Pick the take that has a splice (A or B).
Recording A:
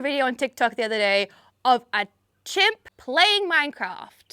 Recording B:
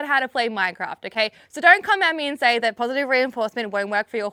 A